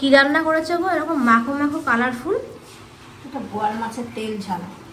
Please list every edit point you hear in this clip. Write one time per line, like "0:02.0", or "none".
none